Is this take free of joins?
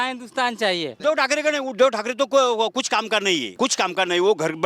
no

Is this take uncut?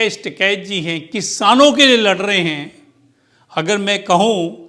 yes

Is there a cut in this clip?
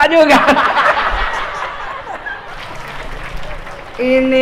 yes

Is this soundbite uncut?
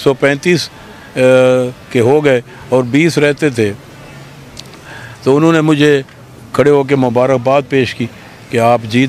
yes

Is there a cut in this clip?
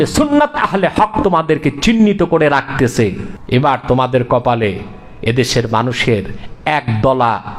yes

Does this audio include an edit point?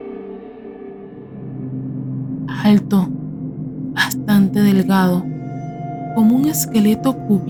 no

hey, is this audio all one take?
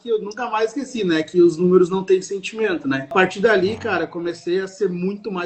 no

